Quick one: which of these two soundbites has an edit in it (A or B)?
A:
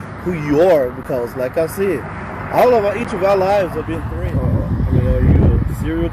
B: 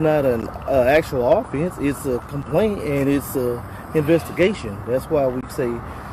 A